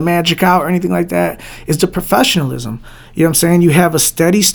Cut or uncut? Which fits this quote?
uncut